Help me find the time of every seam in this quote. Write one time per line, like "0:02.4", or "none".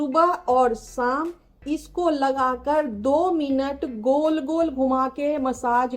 none